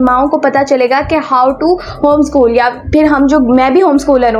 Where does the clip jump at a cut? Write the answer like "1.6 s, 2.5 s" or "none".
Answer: none